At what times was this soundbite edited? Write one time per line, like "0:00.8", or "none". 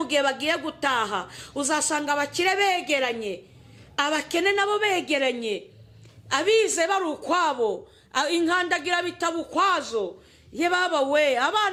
none